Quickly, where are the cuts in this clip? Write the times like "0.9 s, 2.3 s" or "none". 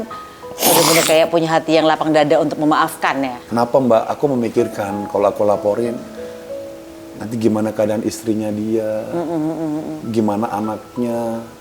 3.4 s, 10.0 s

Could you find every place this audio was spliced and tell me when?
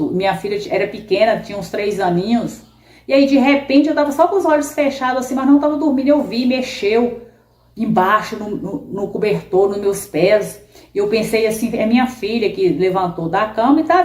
none

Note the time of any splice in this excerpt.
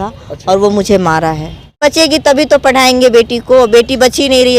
1.8 s

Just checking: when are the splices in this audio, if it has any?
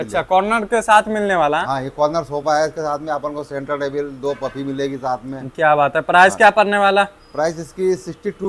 none

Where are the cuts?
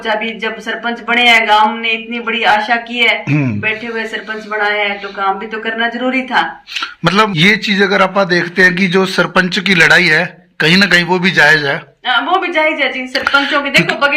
7.3 s

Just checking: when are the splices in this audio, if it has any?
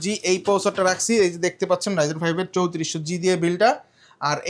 none

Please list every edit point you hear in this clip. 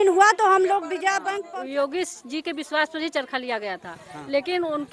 1.3 s

